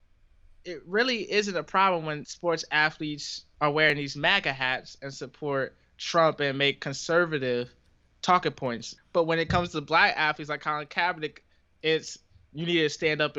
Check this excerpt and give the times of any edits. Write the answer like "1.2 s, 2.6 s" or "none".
2.3 s, 3.4 s, 8.9 s